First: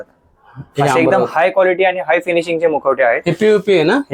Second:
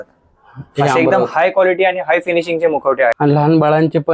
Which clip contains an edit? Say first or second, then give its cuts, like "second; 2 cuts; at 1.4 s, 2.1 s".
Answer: second; 1 cut; at 3.2 s